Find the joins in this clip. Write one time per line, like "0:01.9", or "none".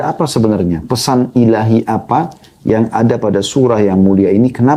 none